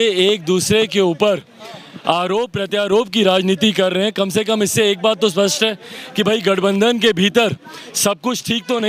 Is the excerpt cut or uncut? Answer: uncut